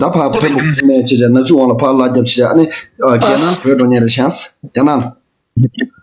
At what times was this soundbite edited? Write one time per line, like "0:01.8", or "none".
none